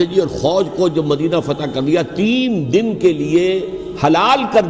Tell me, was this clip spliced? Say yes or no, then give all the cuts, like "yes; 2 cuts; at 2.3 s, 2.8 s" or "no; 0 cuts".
no; 0 cuts